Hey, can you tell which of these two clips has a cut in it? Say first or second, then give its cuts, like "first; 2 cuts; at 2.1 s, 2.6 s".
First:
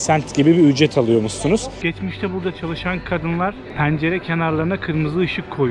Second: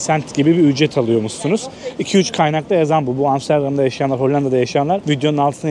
first; 1 cut; at 1.7 s